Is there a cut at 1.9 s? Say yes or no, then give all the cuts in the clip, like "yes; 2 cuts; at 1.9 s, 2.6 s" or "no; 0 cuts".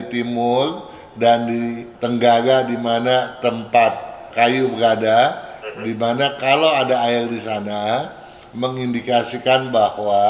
yes; 1 cut; at 1.9 s